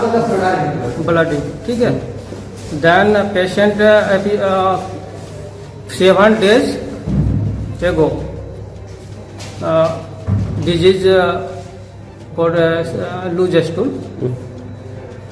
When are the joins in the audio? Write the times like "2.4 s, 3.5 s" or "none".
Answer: none